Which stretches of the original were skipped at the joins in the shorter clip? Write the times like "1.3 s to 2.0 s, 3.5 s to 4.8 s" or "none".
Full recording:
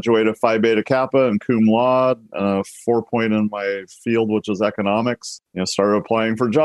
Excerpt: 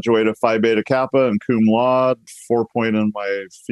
2.3 s to 2.7 s